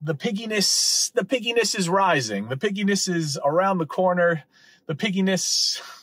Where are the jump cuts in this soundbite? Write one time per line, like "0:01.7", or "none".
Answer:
none